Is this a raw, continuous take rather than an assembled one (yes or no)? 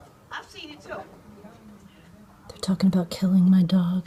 yes